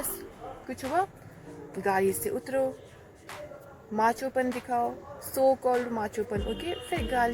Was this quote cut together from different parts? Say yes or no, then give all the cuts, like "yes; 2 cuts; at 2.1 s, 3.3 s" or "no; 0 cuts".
no; 0 cuts